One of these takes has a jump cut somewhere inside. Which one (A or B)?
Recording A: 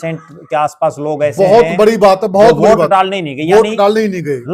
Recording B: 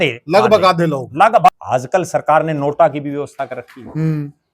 B